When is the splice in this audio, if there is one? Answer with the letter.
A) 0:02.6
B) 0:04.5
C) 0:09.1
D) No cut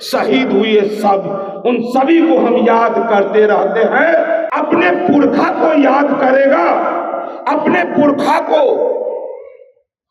B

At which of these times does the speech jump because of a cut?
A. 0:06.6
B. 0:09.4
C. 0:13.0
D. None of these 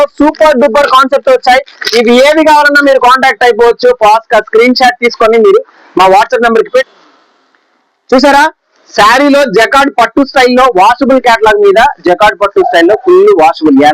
A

